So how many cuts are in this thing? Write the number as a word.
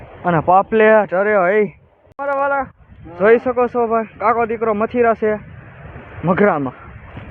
one